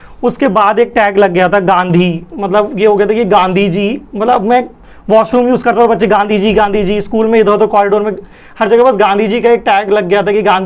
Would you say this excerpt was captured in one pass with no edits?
yes; 0 cuts

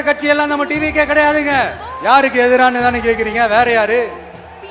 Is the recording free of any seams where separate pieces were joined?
no; 1 cut; at 1.9 s

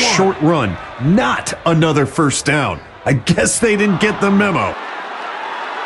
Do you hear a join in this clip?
yes; 1 cut; at 4.8 s

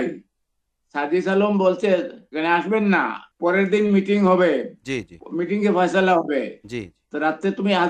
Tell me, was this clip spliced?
yes; 1 cut; at 3.2 s

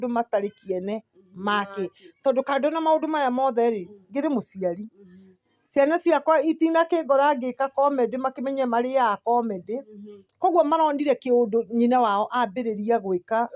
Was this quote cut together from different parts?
no; 0 cuts

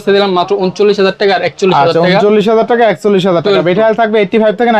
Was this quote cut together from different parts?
no; 0 cuts

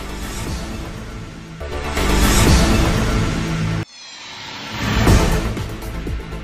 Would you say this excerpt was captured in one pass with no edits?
yes; 0 cuts

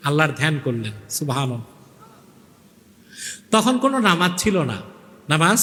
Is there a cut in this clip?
no; 0 cuts

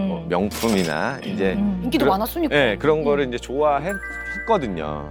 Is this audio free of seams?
yes; 0 cuts

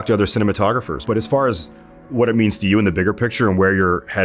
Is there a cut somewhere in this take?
yes; 1 cut; at 1.0 s

